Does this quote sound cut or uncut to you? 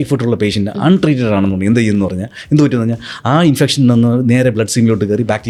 uncut